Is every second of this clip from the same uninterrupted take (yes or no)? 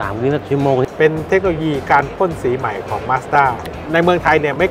no